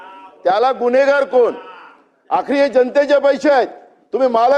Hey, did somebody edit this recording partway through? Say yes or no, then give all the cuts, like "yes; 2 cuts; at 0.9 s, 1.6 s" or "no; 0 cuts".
no; 0 cuts